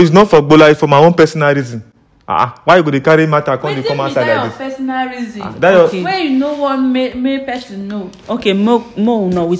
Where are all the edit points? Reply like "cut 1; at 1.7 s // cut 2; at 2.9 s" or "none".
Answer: none

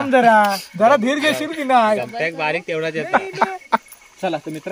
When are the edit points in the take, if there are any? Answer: cut 1; at 3.8 s

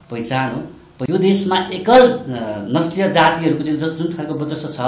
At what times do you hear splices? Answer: cut 1; at 0.9 s

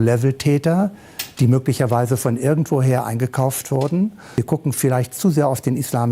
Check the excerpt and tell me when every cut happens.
cut 1; at 4.2 s

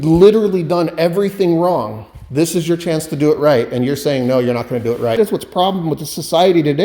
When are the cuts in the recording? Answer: cut 1; at 5.2 s

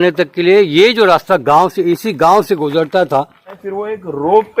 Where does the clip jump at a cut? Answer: cut 1; at 3.5 s

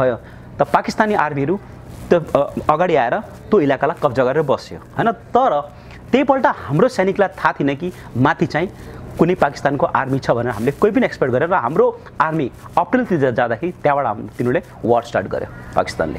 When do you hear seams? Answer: none

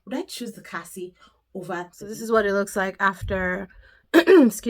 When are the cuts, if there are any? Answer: cut 1; at 2.1 s

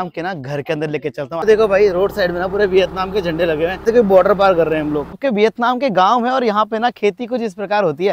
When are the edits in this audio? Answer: cut 1; at 1.4 s // cut 2; at 3.8 s // cut 3; at 5.2 s

